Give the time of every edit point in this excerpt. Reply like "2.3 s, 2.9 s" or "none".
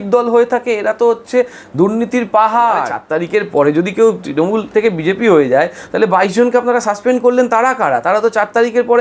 3.0 s